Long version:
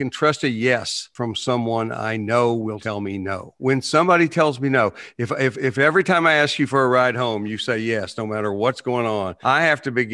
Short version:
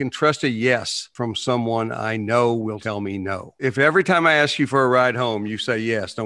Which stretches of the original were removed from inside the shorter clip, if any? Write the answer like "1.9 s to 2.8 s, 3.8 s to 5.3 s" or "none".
3.6 s to 5.6 s